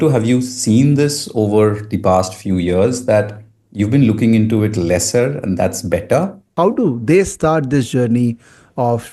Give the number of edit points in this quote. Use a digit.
1